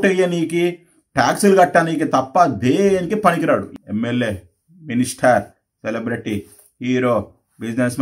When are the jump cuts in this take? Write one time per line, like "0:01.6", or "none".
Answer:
0:03.7

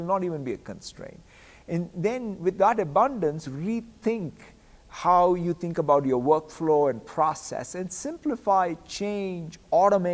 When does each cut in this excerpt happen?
none

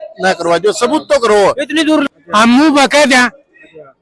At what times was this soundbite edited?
0:02.1

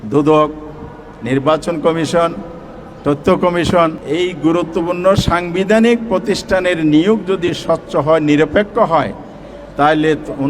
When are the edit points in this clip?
0:04.0

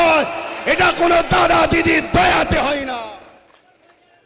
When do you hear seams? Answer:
0:03.1

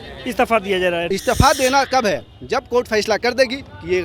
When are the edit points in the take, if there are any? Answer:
0:01.1

